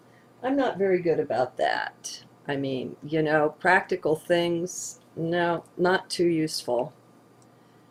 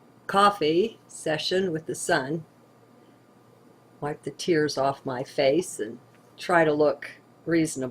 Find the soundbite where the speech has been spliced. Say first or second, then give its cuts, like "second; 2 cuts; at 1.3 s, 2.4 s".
second; 1 cut; at 1.1 s